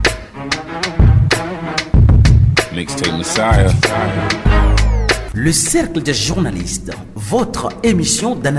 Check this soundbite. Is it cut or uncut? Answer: cut